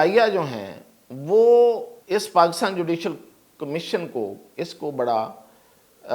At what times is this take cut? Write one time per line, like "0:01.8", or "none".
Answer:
0:01.9
0:04.4